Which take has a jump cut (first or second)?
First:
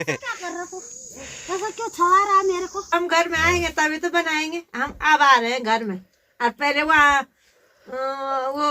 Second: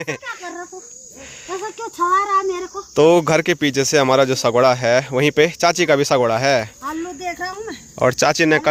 first